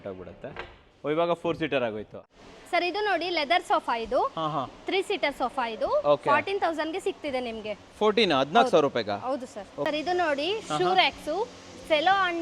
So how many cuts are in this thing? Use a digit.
2